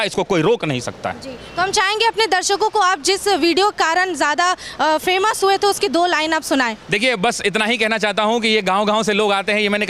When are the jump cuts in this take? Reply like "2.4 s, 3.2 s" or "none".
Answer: none